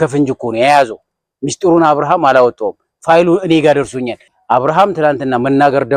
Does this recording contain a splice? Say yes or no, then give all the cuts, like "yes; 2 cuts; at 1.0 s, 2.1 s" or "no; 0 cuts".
yes; 1 cut; at 4.3 s